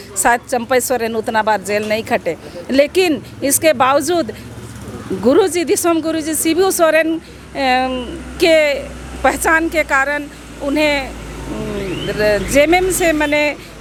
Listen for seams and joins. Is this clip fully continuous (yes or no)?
yes